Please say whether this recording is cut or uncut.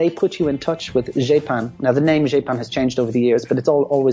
uncut